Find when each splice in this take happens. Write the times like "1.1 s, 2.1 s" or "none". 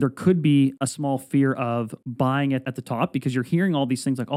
0.8 s, 2.0 s, 2.7 s